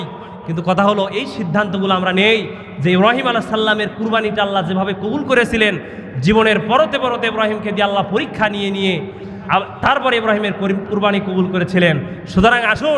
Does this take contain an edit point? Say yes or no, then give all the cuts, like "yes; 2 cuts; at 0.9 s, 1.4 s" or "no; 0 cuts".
no; 0 cuts